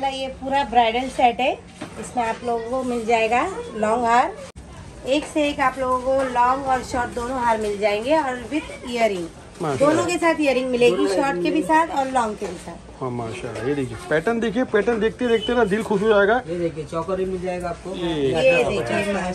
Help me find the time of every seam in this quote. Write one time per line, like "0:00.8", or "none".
0:04.3

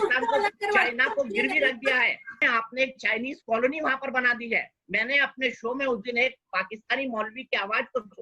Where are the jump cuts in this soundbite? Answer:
0:02.4

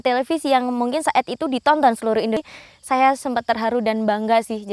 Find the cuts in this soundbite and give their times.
0:02.4

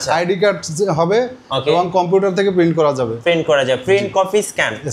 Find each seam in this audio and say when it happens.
none

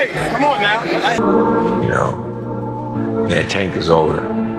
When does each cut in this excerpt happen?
0:01.0

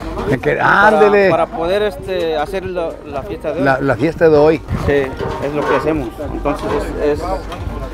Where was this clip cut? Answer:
none

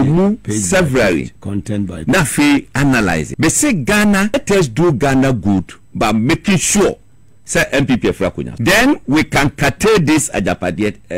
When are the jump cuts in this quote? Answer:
0:03.3
0:04.3
0:08.5

